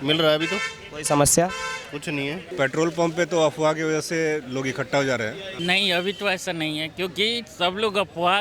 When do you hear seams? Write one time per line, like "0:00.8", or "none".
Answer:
0:02.5
0:05.5